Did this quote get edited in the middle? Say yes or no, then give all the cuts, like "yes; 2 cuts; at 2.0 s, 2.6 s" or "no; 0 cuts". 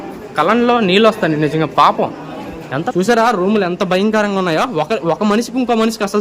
yes; 1 cut; at 2.8 s